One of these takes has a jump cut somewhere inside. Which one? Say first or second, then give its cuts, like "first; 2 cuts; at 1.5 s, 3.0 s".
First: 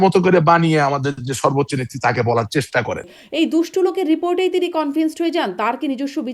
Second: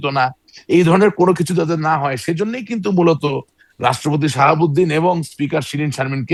first; 1 cut; at 3.2 s